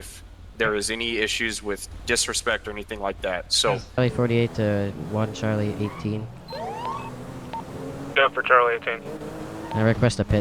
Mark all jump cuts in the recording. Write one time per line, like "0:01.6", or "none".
0:04.0